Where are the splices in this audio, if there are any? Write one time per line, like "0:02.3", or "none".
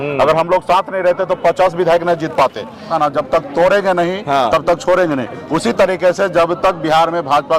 0:02.9